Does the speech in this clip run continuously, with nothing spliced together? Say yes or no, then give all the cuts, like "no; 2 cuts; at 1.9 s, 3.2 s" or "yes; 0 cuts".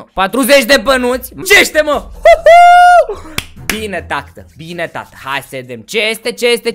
no; 1 cut; at 1.5 s